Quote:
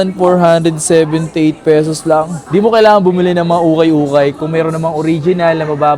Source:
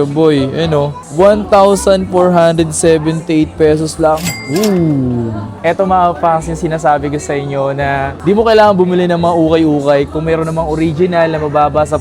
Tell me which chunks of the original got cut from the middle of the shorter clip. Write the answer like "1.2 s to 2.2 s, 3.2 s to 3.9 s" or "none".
4.3 s to 8.1 s